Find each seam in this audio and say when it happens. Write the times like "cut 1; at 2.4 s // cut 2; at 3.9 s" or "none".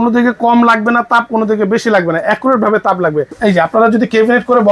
cut 1; at 3.3 s